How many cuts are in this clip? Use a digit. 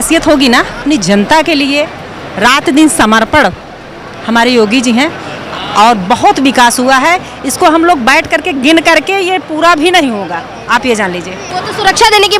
2